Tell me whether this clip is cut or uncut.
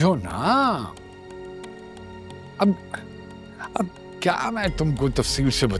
uncut